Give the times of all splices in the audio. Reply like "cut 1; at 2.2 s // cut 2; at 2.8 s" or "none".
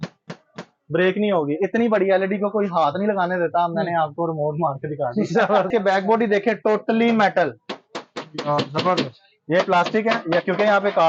cut 1; at 5.7 s